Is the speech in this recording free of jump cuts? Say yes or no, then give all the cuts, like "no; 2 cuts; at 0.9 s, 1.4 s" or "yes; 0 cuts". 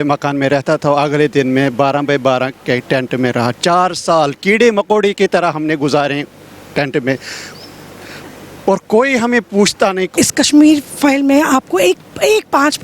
no; 1 cut; at 10.1 s